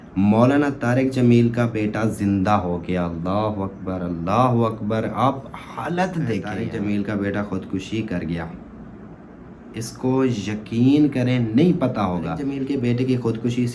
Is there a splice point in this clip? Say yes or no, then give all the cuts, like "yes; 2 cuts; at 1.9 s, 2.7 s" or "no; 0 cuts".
yes; 2 cuts; at 6.6 s, 12.5 s